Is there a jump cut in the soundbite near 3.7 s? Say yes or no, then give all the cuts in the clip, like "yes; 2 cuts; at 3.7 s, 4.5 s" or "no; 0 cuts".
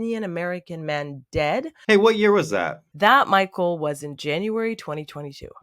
no; 1 cut; at 1.7 s